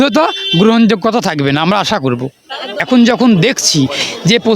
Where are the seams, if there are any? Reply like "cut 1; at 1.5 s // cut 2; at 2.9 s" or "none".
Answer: cut 1; at 2.8 s

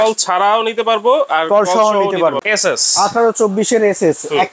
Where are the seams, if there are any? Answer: cut 1; at 2.4 s

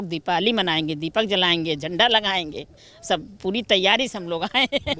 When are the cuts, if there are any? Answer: none

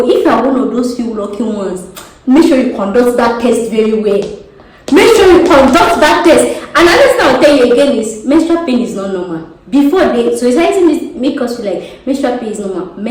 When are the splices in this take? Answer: none

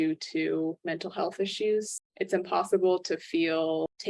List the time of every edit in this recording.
cut 1; at 1.9 s

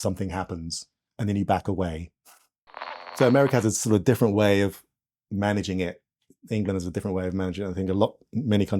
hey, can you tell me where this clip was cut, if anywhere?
cut 1; at 3.0 s

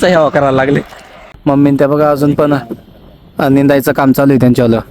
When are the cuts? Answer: cut 1; at 1.1 s

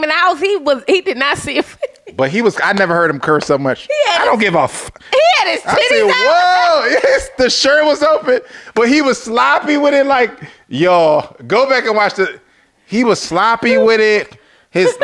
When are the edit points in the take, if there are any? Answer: none

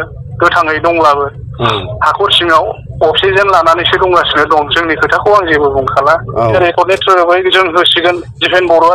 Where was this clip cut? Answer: cut 1; at 6.5 s

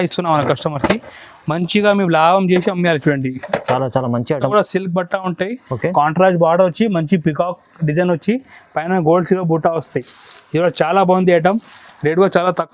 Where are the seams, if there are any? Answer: cut 1; at 4.4 s

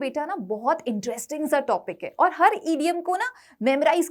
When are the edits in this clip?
none

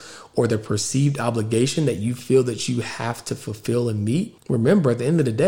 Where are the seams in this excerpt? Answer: cut 1; at 4.4 s

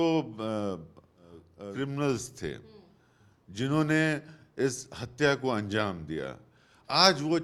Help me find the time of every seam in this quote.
none

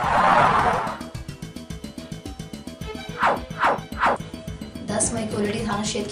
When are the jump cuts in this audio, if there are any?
cut 1; at 1.0 s // cut 2; at 3.2 s // cut 3; at 4.3 s

